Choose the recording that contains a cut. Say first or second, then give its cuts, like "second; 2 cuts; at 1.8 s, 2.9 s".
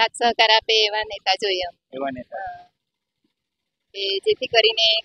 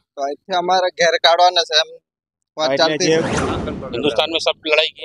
second; 1 cut; at 3.4 s